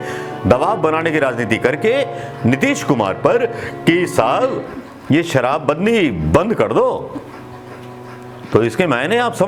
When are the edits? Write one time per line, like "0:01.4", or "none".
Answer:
none